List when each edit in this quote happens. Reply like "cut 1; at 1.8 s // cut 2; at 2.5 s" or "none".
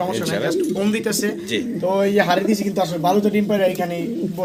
none